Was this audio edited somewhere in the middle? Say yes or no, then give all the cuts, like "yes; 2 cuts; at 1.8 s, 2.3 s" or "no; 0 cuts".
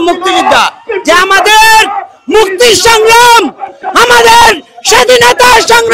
no; 0 cuts